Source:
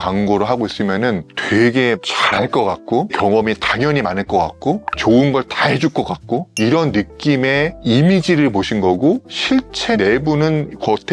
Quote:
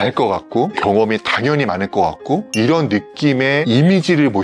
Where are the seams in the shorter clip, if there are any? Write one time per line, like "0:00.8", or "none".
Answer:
0:02.5
0:03.6